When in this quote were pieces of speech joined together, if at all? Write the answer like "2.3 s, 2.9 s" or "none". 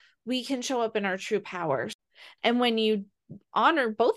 1.9 s